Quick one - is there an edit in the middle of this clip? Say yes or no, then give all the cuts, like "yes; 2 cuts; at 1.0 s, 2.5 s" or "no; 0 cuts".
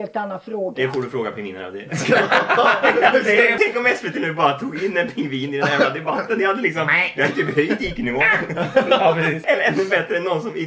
yes; 2 cuts; at 3.5 s, 9.4 s